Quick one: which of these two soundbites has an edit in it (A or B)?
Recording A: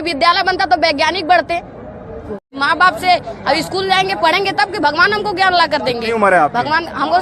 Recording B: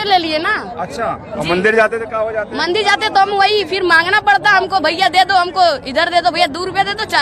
A